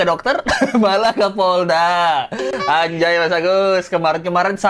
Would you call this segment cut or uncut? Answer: uncut